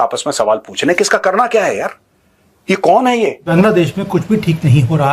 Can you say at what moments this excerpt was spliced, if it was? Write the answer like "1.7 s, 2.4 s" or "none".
3.4 s